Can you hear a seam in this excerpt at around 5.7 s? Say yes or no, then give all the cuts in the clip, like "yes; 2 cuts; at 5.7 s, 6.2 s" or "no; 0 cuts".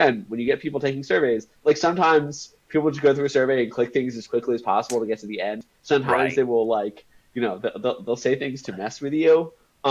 yes; 1 cut; at 5.7 s